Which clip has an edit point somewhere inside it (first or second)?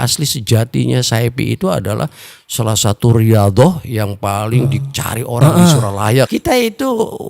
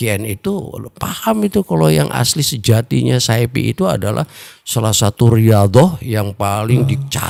first